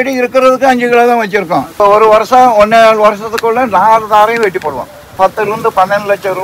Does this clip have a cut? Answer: yes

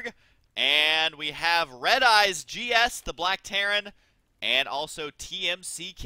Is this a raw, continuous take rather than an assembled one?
no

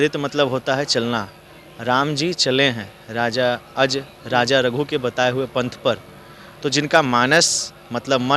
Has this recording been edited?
no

